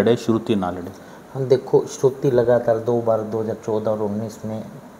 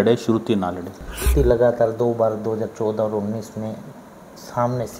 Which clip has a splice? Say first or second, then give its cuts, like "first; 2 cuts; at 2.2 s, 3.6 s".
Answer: second; 1 cut; at 1.3 s